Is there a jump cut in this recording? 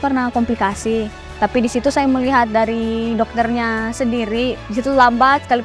no; 0 cuts

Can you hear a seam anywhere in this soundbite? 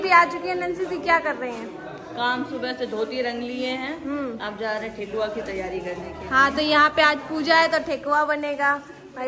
no; 0 cuts

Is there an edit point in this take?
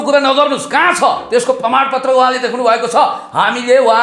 no; 0 cuts

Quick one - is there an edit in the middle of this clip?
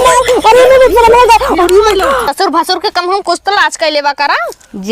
yes; 1 cut; at 2.3 s

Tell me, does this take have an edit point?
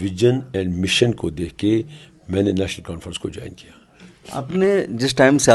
no; 0 cuts

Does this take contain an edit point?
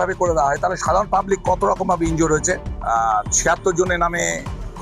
yes; 1 cut; at 2.7 s

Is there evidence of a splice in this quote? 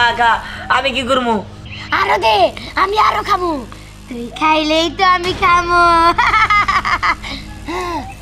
yes; 1 cut; at 1.6 s

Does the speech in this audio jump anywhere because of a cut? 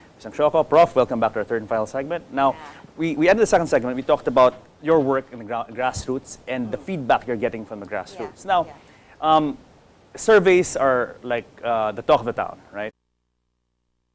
no; 0 cuts

